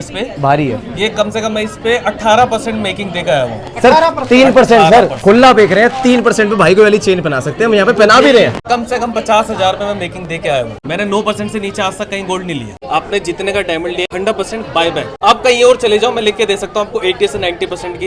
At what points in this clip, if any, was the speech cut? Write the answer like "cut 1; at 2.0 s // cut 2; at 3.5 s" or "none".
cut 1; at 8.6 s // cut 2; at 10.8 s // cut 3; at 12.7 s // cut 4; at 14.0 s // cut 5; at 15.1 s